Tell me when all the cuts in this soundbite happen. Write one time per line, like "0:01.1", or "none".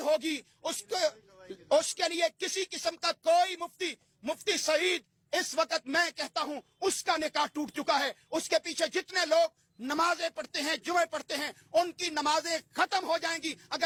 none